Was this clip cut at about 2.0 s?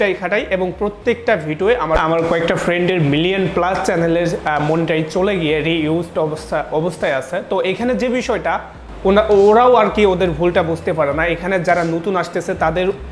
yes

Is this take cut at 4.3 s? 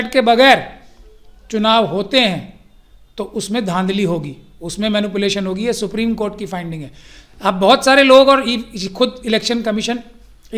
no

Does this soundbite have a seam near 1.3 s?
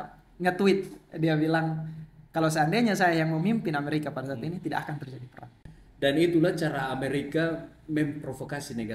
no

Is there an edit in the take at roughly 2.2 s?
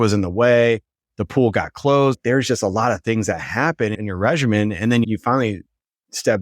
yes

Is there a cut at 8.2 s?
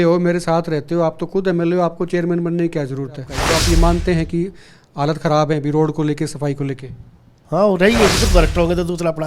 yes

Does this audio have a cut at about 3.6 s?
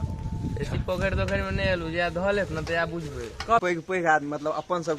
yes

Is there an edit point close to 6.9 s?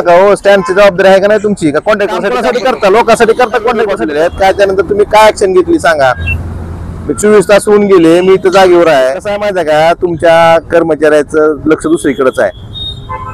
no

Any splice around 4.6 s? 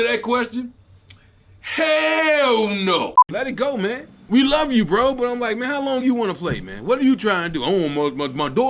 no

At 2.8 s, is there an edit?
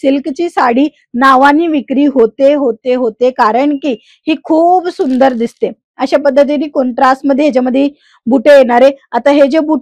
no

